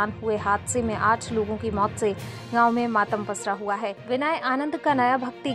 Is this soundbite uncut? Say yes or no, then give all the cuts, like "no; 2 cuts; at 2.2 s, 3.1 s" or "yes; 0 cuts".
no; 1 cut; at 4.0 s